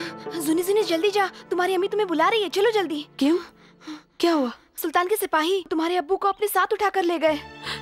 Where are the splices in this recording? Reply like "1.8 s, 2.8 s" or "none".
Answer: 4.8 s, 5.7 s